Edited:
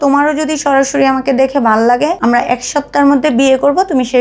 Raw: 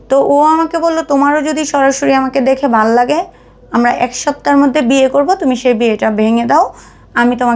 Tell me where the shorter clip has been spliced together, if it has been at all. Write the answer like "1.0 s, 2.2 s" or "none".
2.2 s